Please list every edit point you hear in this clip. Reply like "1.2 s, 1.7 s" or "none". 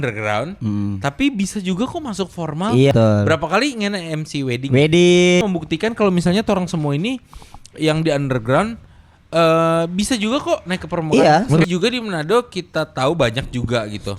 2.9 s, 5.4 s, 11.6 s